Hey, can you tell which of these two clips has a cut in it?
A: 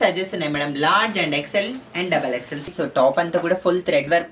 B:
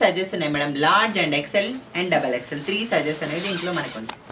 A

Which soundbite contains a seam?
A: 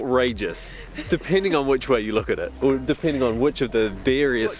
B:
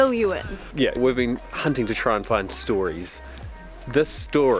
B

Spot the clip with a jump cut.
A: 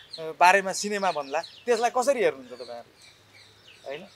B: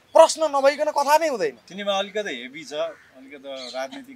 B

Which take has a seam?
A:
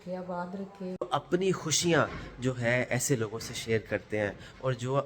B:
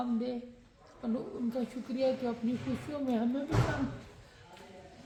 A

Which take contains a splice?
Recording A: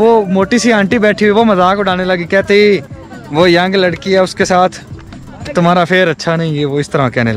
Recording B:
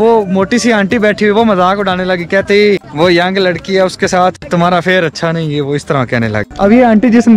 B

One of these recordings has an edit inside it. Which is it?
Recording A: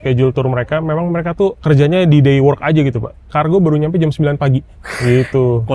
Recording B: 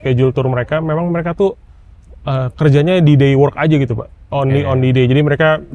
A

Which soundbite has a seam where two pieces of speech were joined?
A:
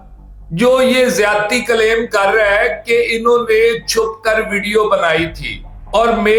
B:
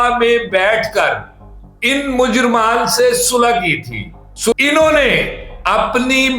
B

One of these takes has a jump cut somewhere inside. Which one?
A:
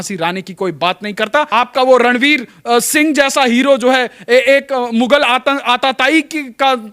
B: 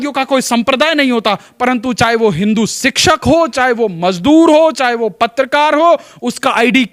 A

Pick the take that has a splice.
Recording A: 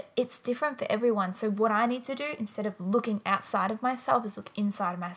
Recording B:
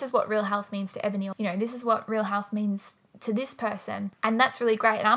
B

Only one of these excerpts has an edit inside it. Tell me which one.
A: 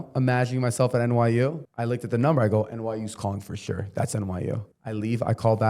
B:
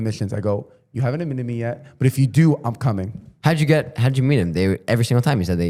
A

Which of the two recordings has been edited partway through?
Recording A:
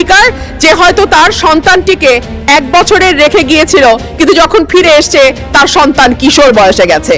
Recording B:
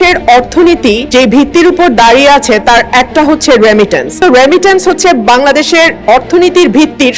B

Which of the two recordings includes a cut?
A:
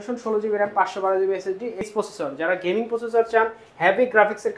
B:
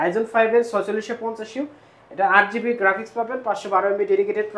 A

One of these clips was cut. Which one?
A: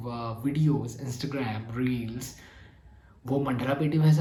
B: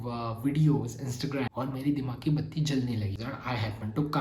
B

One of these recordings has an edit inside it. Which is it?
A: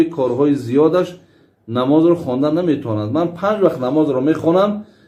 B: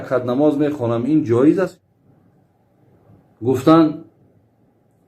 B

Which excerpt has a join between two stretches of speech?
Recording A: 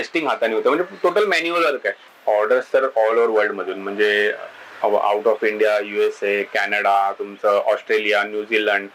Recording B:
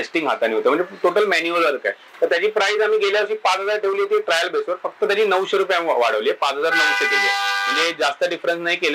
A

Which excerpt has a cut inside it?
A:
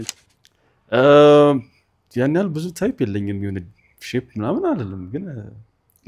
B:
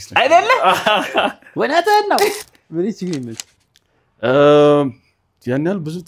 B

